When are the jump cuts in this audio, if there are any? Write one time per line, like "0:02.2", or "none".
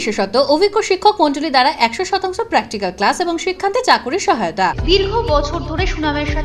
none